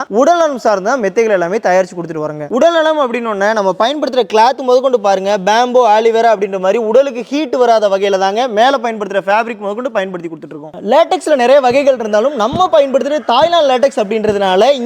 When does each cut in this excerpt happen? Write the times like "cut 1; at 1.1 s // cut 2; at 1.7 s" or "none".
none